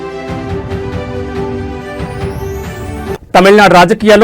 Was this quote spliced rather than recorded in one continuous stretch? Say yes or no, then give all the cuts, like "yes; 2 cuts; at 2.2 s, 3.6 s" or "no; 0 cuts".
no; 0 cuts